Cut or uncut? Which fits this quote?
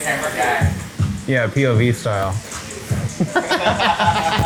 uncut